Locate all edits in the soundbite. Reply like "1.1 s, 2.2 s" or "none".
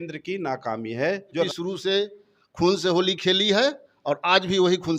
1.5 s